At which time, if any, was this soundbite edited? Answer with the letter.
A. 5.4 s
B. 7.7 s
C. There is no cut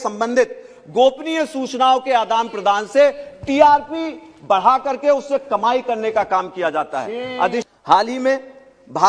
B